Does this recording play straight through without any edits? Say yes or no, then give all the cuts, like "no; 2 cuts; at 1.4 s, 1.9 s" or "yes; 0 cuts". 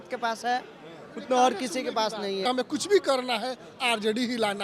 no; 1 cut; at 2.5 s